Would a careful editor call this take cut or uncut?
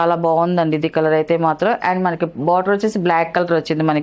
uncut